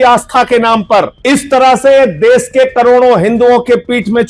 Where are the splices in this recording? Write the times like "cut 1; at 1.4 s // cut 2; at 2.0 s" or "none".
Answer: cut 1; at 1.2 s